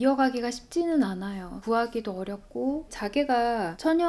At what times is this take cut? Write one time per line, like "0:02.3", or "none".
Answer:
none

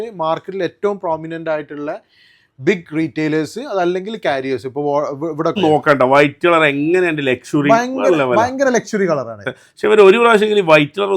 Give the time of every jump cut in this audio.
0:05.6

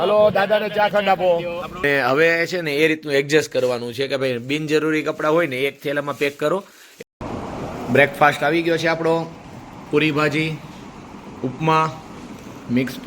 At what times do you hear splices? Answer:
0:01.8
0:06.9

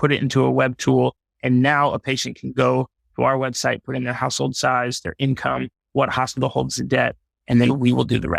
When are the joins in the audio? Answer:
none

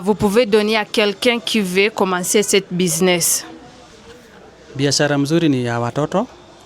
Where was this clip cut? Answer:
none

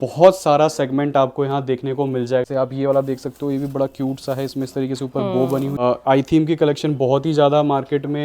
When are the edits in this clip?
0:02.4
0:05.8

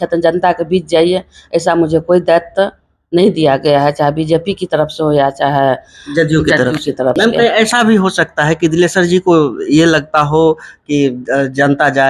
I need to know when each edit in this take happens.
0:07.2

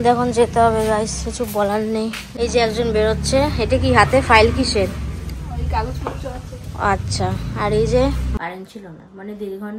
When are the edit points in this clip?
0:02.2
0:08.3

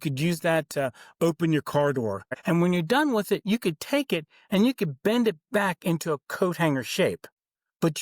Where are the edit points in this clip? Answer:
0:02.3

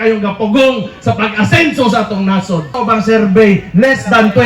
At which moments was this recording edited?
0:02.7

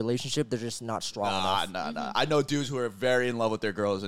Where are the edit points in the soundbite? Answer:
none

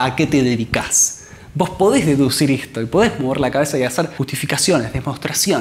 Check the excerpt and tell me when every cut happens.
0:04.2

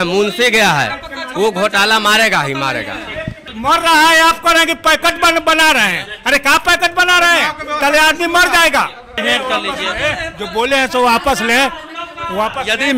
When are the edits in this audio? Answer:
0:03.4
0:09.2

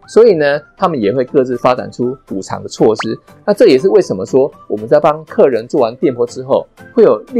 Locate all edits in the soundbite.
0:03.3

